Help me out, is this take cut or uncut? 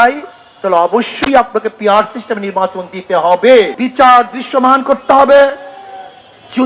cut